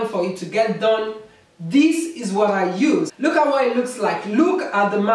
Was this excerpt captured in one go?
no; 1 cut; at 3.1 s

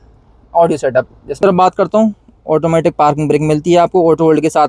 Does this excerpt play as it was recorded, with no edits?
no; 1 cut; at 1.4 s

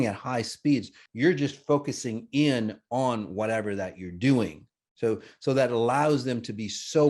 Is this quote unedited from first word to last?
no; 1 cut; at 1.0 s

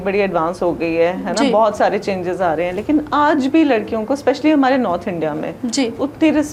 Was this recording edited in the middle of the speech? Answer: no; 0 cuts

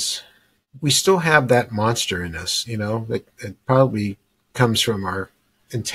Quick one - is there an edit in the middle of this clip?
no; 0 cuts

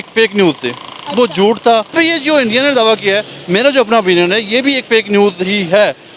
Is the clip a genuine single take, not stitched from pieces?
no; 1 cut; at 1.9 s

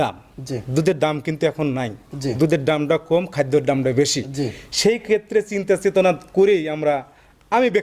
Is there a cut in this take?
no; 0 cuts

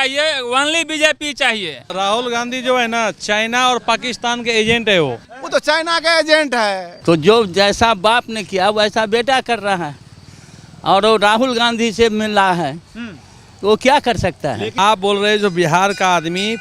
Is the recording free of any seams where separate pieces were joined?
no; 4 cuts; at 1.8 s, 5.3 s, 6.9 s, 14.7 s

